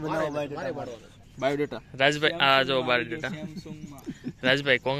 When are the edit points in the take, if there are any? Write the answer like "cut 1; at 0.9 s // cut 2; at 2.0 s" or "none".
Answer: cut 1; at 1.2 s